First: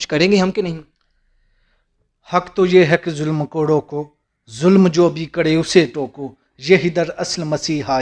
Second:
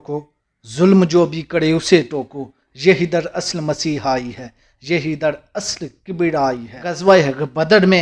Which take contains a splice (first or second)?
second